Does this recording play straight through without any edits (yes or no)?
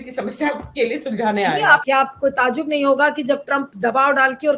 no